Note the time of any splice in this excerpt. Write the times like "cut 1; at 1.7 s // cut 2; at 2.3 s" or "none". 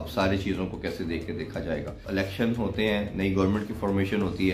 cut 1; at 2.0 s